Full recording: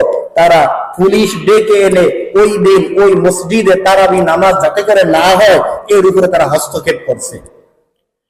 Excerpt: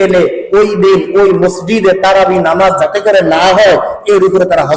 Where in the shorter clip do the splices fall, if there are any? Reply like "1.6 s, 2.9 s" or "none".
none